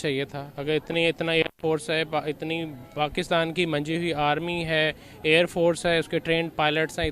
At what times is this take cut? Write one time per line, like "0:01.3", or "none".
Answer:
none